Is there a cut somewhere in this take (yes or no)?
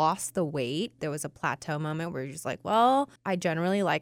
yes